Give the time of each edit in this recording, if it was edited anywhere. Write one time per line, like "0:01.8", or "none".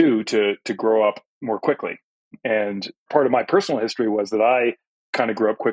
none